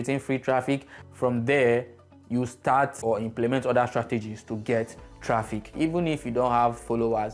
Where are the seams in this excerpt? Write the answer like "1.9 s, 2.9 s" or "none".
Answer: 3.0 s, 5.7 s